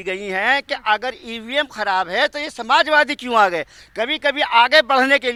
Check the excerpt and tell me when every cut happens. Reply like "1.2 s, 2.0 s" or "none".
none